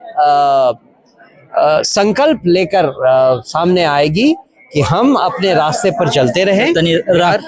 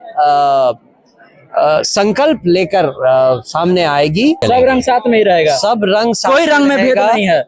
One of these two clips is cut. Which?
second; 1 cut; at 4.4 s

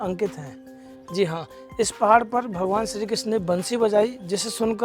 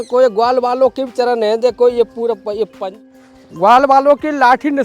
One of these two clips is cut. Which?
second; 1 cut; at 2.9 s

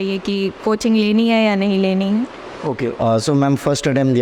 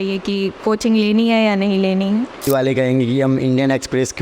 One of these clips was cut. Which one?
second; 1 cut; at 2.3 s

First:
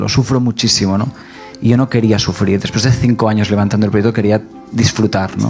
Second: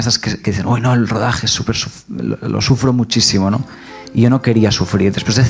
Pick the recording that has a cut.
first; 1 cut; at 4.6 s

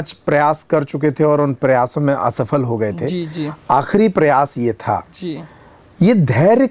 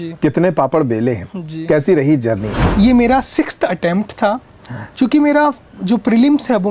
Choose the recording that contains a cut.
second; 1 cut; at 2.6 s

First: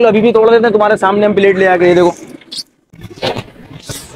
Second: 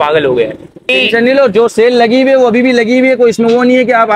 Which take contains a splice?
second; 1 cut; at 0.9 s

